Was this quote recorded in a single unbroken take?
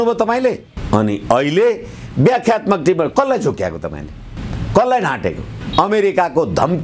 no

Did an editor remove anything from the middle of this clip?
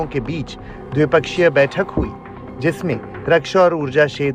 no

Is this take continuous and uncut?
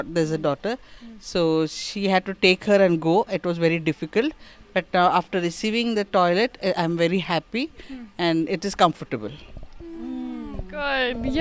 yes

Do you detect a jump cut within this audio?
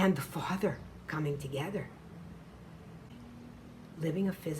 yes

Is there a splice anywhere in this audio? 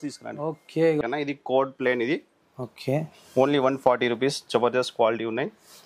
yes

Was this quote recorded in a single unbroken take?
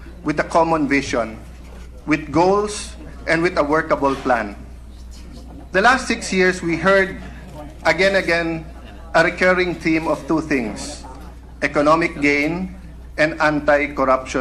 no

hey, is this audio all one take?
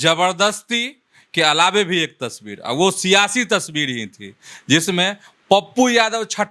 yes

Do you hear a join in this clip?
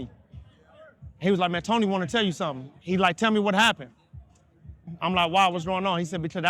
yes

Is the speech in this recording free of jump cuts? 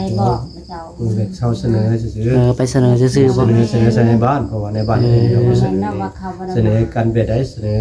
yes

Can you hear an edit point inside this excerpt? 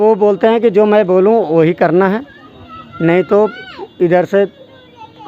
no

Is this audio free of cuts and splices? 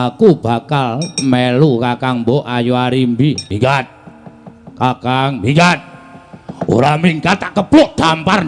yes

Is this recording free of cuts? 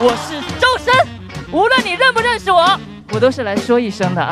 no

